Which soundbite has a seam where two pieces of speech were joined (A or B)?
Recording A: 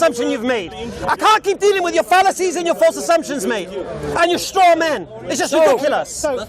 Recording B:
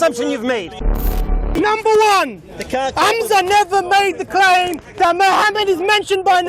B